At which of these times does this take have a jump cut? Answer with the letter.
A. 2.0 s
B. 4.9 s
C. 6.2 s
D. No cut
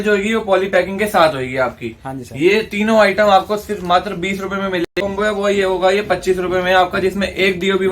B